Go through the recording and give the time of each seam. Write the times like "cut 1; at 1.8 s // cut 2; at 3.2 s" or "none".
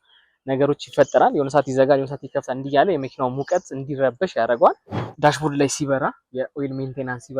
cut 1; at 5.1 s